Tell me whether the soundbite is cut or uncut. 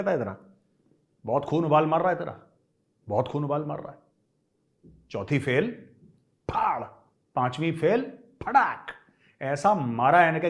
uncut